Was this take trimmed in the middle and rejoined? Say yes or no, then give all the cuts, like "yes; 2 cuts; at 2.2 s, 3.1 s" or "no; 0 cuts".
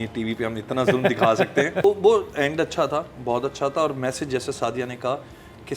yes; 1 cut; at 1.8 s